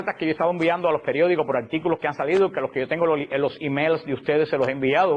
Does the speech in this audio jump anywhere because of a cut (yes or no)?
no